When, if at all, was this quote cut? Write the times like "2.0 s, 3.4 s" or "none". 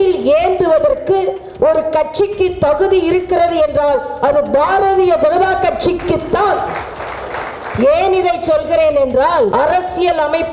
9.5 s